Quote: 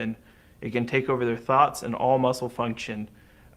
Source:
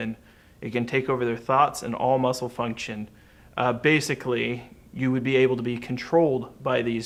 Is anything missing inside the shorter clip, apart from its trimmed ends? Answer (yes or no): no